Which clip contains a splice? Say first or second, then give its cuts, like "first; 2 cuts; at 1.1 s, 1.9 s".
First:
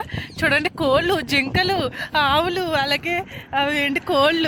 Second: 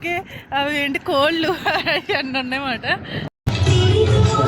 second; 1 cut; at 3.5 s